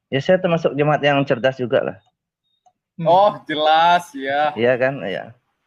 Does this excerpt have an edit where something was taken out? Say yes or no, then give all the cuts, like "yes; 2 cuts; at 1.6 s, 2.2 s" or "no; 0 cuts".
no; 0 cuts